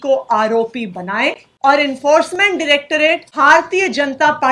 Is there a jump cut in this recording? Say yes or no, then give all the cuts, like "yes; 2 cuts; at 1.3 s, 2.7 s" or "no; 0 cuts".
yes; 2 cuts; at 1.5 s, 3.3 s